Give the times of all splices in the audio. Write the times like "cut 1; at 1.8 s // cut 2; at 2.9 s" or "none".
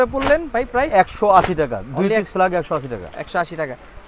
none